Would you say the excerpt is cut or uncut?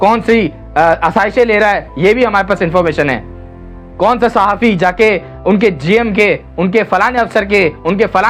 uncut